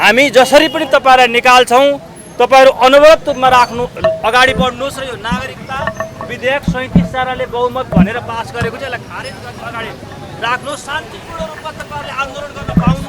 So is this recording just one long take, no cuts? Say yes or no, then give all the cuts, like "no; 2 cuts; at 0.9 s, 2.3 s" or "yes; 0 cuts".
yes; 0 cuts